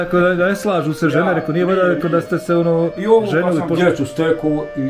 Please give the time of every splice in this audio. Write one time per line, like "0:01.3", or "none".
0:03.7